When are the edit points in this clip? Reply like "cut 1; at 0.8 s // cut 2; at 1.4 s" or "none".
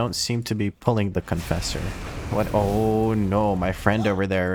none